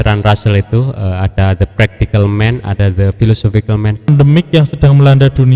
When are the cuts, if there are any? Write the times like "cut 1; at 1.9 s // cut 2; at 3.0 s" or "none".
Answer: cut 1; at 4.1 s